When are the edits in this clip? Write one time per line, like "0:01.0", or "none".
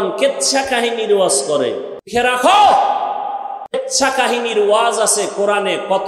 0:02.1
0:03.8

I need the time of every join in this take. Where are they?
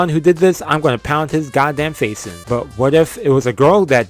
0:02.3

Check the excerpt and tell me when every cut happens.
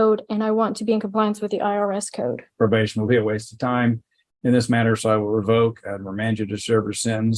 0:02.5

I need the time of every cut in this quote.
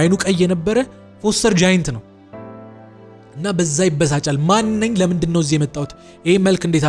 none

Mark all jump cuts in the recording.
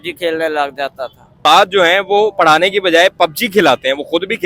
0:01.3

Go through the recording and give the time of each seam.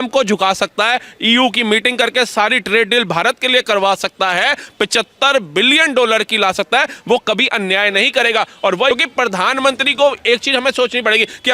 0:08.9

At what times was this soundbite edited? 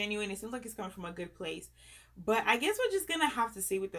none

